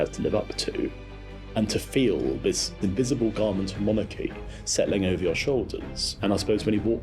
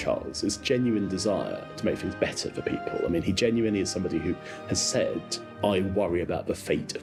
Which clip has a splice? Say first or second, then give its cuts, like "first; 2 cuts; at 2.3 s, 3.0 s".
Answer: first; 3 cuts; at 1.1 s, 2.7 s, 6.0 s